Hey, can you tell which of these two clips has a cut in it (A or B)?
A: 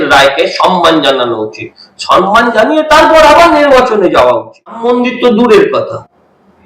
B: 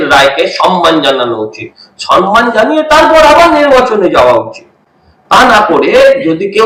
A